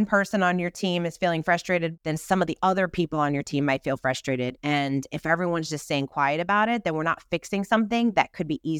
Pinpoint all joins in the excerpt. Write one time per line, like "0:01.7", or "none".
0:01.9
0:04.6

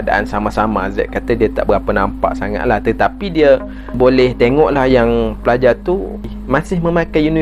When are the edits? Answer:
0:03.9
0:06.3

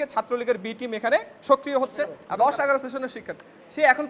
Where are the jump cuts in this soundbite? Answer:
0:02.2

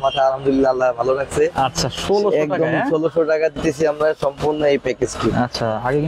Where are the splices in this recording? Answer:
none

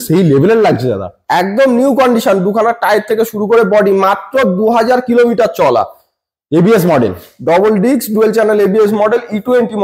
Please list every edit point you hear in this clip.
none

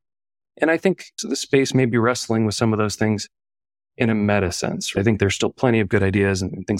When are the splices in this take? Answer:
0:04.9

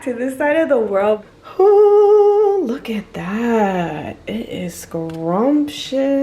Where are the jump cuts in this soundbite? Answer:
0:01.3

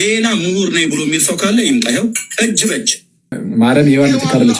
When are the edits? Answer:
0:03.4

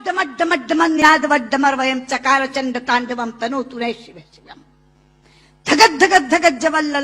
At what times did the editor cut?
0:01.0

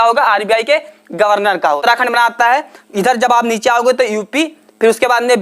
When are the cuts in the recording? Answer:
0:01.8

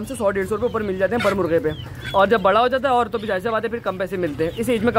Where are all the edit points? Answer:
none

